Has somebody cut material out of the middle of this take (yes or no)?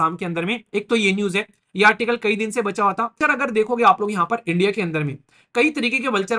yes